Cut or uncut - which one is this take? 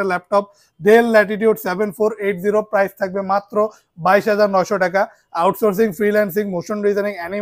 uncut